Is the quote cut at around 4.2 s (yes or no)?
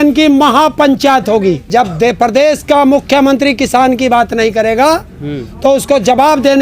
no